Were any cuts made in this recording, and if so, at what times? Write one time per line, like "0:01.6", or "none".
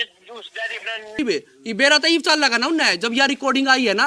0:01.2